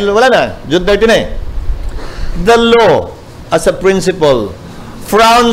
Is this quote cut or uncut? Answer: uncut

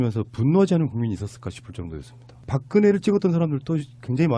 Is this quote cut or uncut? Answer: uncut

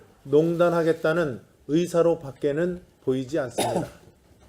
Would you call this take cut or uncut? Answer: uncut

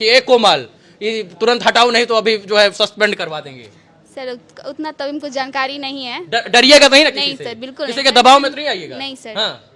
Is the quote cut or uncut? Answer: uncut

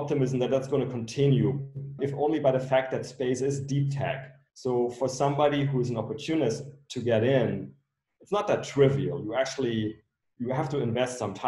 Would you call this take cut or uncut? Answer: cut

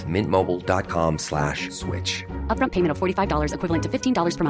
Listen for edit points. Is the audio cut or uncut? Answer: uncut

